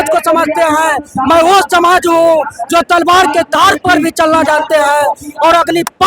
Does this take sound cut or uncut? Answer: uncut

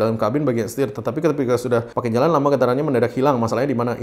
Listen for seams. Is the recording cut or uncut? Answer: uncut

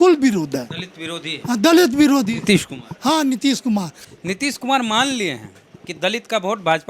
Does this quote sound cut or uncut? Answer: cut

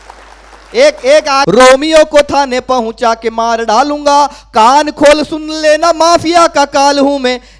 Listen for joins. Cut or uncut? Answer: cut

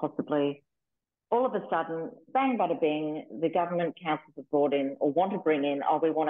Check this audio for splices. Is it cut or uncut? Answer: cut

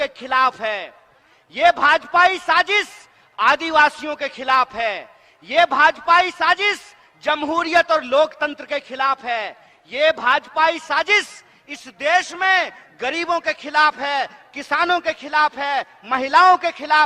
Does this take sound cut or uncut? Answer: uncut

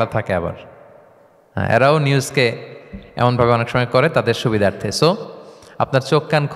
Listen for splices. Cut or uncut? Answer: uncut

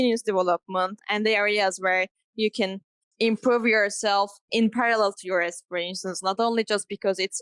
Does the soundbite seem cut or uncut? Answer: uncut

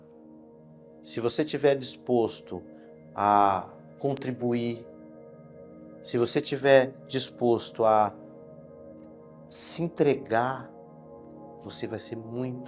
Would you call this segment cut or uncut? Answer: uncut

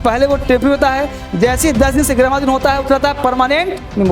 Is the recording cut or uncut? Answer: uncut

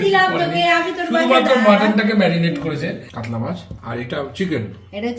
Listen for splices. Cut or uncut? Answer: cut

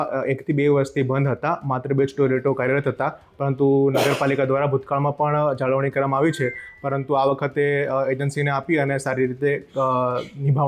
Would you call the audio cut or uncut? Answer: uncut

